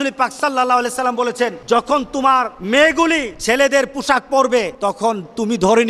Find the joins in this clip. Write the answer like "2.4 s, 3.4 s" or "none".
1.6 s, 2.6 s, 3.3 s, 4.7 s